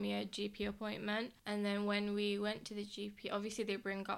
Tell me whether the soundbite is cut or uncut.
cut